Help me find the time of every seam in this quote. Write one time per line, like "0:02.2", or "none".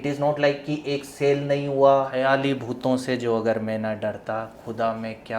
0:02.1